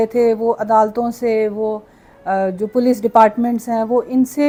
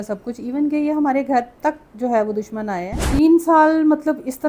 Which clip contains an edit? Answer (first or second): second